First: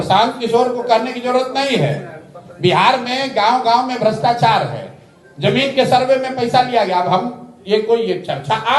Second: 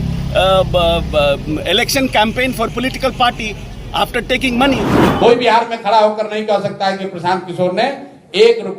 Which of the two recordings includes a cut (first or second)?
second